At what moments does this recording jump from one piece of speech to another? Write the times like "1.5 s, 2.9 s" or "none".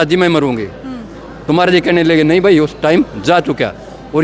none